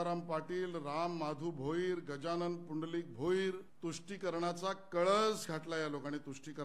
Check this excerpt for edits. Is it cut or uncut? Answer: cut